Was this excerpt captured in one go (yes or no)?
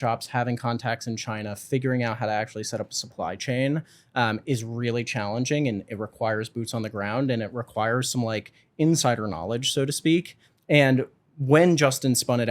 yes